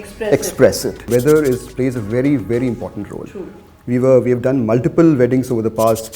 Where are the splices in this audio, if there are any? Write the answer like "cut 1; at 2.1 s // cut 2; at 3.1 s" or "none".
cut 1; at 1.1 s